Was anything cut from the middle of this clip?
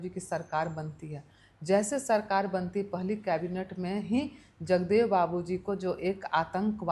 no; 0 cuts

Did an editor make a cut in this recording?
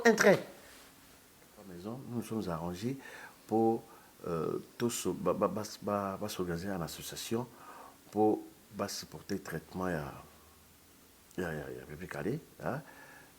yes; 1 cut; at 1.8 s

